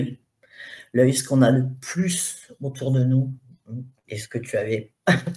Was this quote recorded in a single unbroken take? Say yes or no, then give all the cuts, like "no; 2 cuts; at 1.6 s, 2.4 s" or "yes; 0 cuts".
yes; 0 cuts